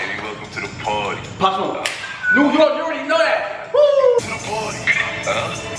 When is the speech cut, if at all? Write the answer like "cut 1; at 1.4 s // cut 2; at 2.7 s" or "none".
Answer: cut 1; at 4.2 s